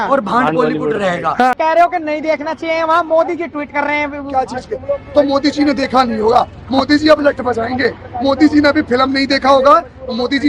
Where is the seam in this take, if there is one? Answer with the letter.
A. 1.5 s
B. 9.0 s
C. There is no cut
A